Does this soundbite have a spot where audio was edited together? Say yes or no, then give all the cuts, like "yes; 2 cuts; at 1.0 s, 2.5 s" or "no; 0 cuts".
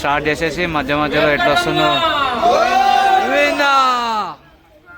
no; 0 cuts